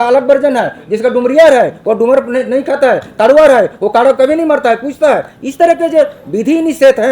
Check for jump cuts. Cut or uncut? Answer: uncut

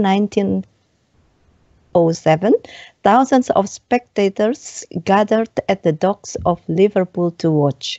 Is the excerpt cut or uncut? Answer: cut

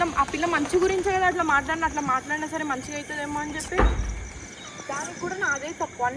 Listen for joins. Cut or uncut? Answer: uncut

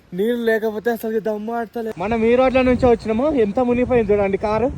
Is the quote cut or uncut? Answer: cut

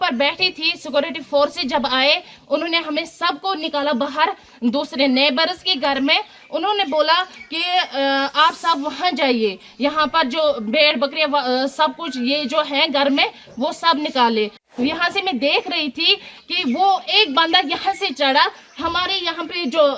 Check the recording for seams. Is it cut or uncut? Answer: cut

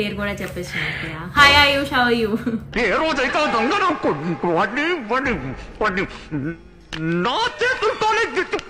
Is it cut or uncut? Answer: uncut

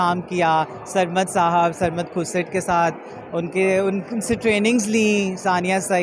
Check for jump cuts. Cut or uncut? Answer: uncut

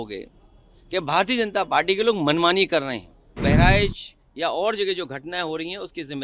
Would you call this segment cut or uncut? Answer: cut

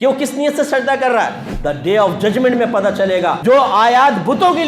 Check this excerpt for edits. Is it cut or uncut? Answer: cut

